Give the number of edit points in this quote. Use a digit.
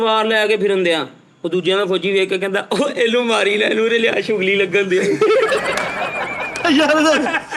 0